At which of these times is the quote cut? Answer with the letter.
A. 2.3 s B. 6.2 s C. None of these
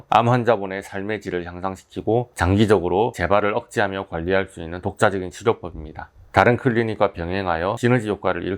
B